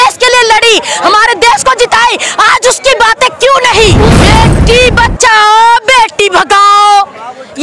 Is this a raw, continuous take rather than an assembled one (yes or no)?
no